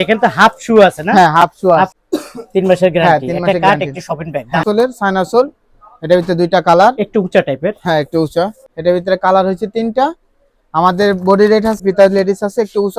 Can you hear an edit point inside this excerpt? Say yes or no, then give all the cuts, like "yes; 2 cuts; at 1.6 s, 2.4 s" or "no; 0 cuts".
yes; 4 cuts; at 2.0 s, 4.6 s, 8.6 s, 11.8 s